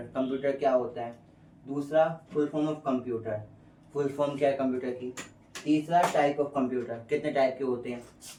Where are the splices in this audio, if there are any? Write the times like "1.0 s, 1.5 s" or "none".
none